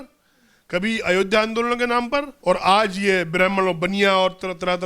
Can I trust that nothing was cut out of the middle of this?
no; 1 cut; at 2.3 s

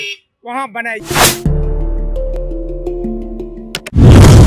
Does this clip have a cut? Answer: no; 0 cuts

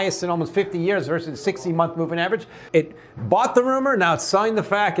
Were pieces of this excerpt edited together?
yes; 1 cut; at 2.5 s

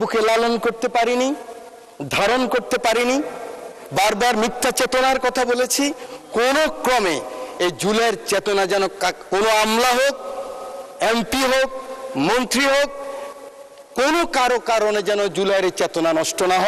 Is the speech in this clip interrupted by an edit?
no; 0 cuts

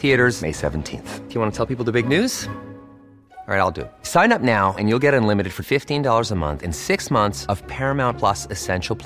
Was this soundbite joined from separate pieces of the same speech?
no; 0 cuts

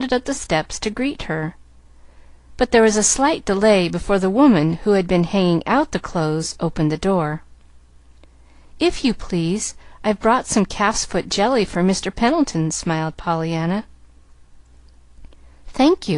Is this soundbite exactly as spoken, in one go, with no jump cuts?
yes; 0 cuts

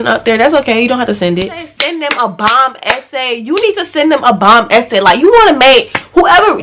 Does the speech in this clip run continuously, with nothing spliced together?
no; 1 cut; at 1.6 s

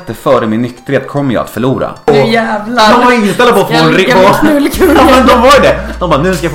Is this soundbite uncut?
no; 1 cut; at 2.1 s

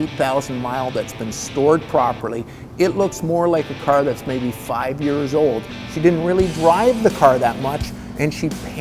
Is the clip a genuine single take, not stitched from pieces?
no; 1 cut; at 5.7 s

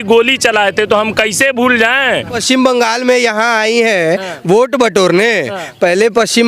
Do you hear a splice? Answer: yes; 1 cut; at 2.4 s

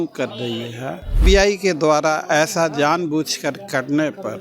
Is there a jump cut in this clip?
yes; 1 cut; at 1.2 s

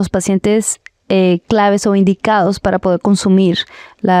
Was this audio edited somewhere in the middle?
no; 0 cuts

